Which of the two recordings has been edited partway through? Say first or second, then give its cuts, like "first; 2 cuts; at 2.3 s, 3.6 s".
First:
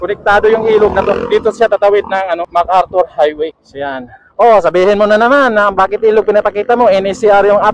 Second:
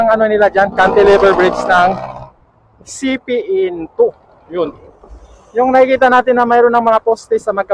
first; 2 cuts; at 2.5 s, 3.7 s